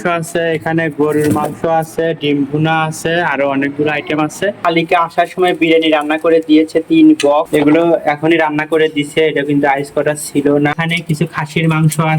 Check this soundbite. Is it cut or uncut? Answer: cut